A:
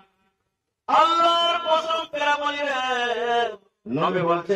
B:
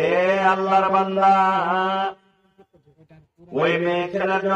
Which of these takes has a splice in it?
A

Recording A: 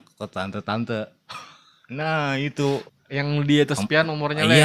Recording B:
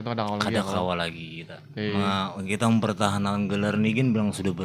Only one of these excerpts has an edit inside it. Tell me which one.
A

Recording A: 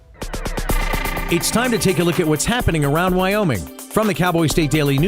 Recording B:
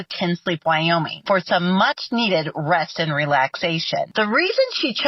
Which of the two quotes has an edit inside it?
A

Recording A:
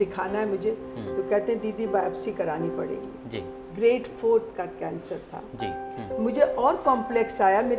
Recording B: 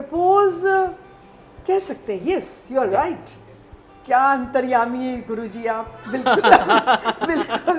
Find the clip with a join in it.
A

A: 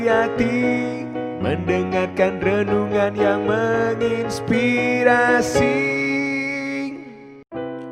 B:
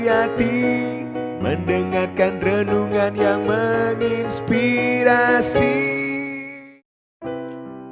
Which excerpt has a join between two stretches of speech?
B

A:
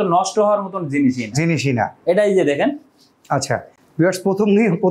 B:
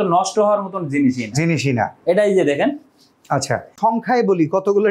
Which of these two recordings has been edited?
B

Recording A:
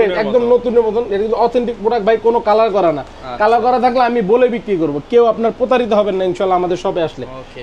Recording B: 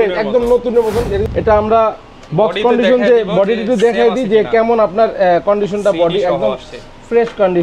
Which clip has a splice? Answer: B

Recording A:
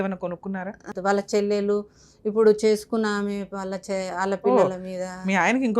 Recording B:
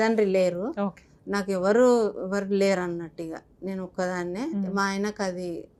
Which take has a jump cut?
A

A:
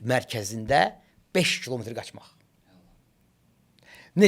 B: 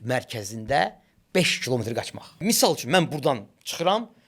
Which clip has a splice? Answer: B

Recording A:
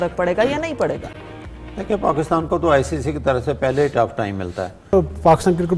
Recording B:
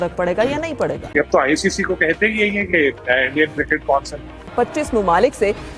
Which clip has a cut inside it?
B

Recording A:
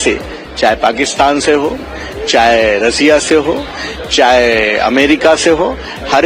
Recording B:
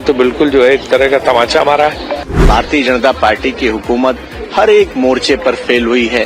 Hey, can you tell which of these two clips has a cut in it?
B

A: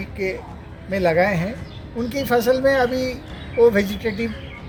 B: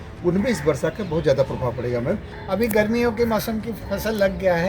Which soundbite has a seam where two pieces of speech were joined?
B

